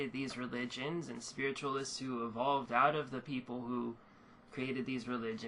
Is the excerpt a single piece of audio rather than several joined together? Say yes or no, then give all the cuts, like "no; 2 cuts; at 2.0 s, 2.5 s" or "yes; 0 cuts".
no; 1 cut; at 1.9 s